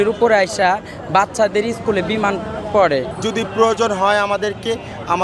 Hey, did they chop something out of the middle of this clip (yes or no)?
yes